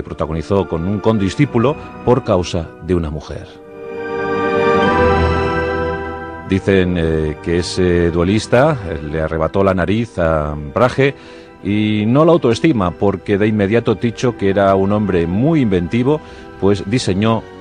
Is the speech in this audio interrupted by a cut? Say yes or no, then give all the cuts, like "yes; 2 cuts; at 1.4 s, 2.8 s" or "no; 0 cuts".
no; 0 cuts